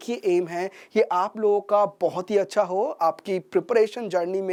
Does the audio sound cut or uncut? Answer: uncut